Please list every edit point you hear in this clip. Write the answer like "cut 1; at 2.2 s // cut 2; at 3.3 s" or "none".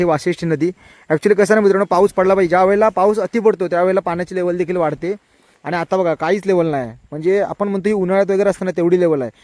none